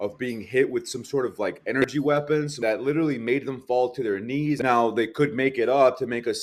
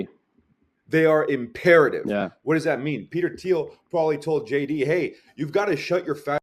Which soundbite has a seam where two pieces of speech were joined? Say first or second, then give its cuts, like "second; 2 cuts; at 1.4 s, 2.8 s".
first; 2 cuts; at 2.3 s, 4.6 s